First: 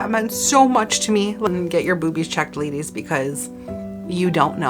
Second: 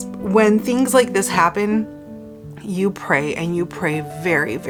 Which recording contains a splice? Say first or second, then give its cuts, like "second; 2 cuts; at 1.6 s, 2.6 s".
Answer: first; 1 cut; at 1.5 s